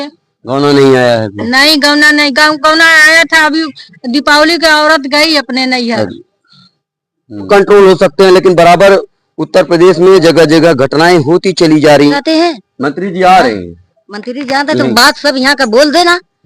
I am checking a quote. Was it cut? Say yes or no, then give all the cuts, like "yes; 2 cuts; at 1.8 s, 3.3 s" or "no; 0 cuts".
yes; 2 cuts; at 7.5 s, 12.1 s